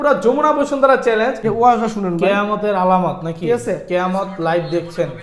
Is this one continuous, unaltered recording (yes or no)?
no